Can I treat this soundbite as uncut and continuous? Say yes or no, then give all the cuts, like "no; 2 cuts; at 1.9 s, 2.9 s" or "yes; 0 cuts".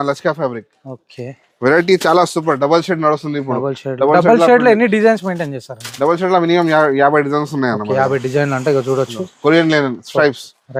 yes; 0 cuts